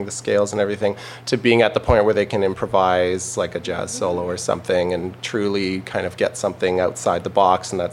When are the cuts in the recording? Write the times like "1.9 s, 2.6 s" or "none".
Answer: none